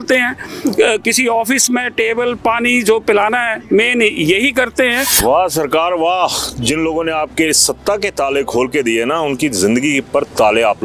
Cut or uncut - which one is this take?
uncut